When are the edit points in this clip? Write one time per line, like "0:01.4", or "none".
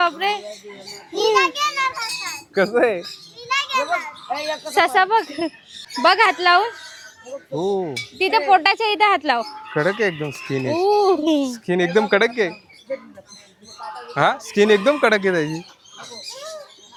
none